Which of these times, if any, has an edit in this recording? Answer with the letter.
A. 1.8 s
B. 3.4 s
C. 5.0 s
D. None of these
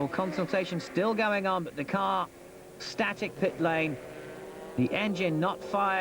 B